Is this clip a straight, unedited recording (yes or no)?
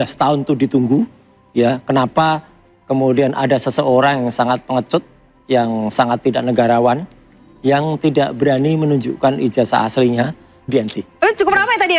no